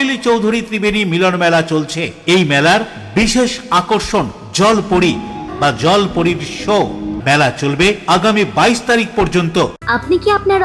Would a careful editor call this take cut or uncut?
cut